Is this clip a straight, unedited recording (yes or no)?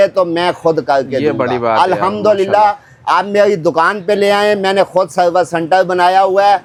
yes